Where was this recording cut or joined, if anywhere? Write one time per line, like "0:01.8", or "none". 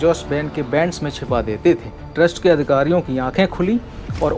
0:02.0